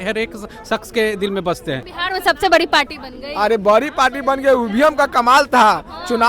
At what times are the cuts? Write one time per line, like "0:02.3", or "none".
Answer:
0:01.9